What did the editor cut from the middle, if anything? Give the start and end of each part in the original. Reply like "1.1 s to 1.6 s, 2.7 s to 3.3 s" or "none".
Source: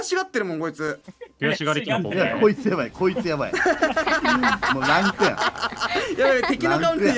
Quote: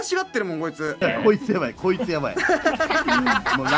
1.0 s to 2.2 s